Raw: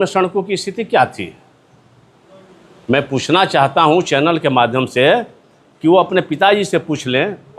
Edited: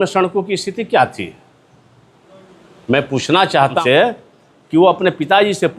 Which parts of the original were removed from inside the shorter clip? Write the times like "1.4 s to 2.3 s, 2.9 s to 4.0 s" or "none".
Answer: 3.8 s to 4.9 s